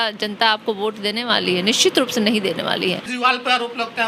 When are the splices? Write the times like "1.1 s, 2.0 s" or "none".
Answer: 3.1 s